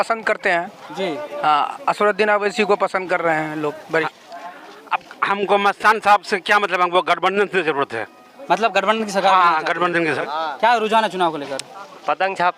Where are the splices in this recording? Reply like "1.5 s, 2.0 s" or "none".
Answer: 4.1 s, 10.2 s